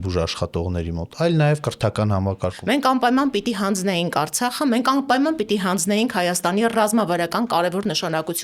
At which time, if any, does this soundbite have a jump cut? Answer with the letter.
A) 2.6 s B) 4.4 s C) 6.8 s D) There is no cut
A